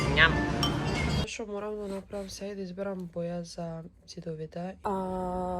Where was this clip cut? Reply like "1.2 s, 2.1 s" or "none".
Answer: 1.3 s, 4.8 s